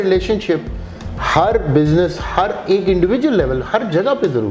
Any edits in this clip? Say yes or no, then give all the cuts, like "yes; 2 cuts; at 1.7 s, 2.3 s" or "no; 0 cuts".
no; 0 cuts